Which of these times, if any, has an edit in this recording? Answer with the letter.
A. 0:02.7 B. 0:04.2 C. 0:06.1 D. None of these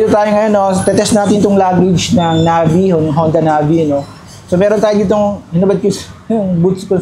D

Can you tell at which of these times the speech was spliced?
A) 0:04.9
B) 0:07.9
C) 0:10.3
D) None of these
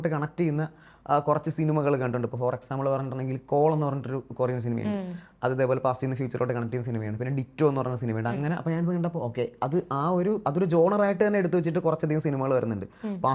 D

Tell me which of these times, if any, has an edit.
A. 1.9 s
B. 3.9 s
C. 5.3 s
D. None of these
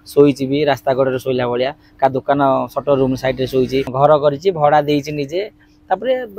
B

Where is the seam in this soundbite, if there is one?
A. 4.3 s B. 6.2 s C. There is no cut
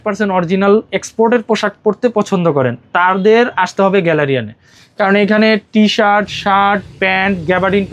C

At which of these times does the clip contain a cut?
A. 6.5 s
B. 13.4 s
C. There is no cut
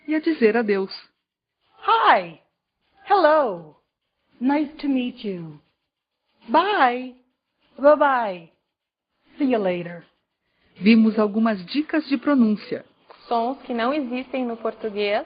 A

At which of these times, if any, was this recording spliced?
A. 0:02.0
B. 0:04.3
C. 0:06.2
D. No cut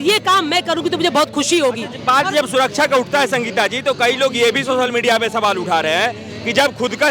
D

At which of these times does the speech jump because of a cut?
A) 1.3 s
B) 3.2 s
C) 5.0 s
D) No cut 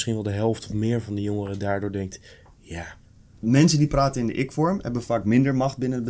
B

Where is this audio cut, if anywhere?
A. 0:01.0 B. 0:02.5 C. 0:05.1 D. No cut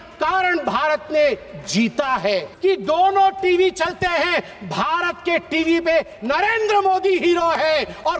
B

